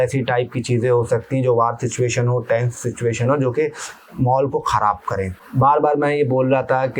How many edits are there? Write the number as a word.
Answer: one